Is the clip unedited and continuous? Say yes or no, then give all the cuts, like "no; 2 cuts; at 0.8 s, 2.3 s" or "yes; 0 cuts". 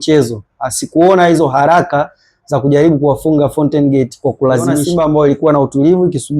no; 1 cut; at 4.9 s